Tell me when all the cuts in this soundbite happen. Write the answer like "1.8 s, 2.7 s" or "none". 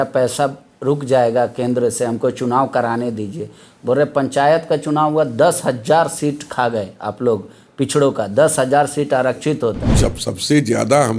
9.9 s